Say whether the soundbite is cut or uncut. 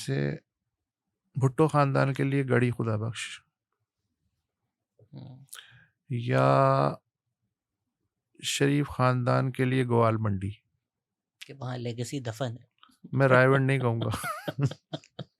uncut